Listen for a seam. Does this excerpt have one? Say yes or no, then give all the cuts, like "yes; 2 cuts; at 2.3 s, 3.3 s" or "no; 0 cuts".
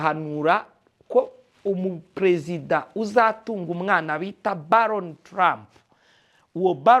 no; 0 cuts